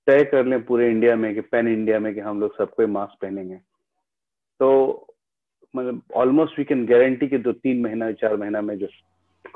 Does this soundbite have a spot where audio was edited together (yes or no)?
no